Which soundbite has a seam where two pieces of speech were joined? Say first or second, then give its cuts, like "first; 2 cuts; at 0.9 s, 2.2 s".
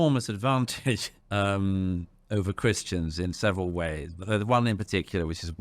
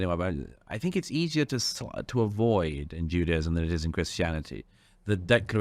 first; 1 cut; at 1.1 s